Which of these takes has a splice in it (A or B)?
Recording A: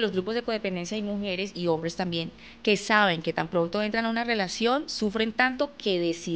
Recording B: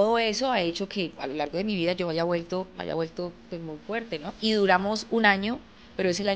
B